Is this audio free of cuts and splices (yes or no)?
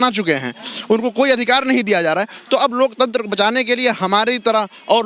yes